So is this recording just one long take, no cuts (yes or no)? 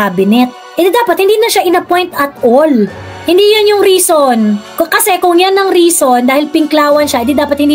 yes